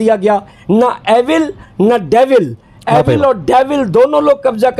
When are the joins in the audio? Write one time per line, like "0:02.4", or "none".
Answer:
none